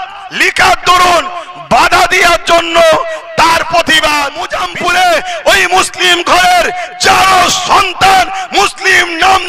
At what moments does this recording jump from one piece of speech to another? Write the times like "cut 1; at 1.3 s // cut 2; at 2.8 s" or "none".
cut 1; at 4.5 s